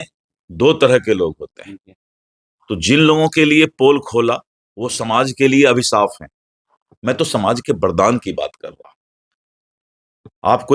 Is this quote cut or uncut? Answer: uncut